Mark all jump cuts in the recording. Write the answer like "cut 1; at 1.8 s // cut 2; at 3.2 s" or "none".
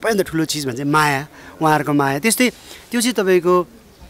none